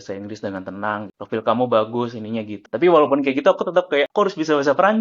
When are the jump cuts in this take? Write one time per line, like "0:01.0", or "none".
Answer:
0:01.1
0:02.6
0:04.1